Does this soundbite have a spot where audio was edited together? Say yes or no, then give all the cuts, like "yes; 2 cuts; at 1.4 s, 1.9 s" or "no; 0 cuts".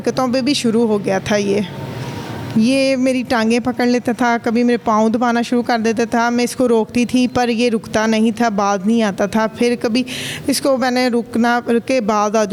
no; 0 cuts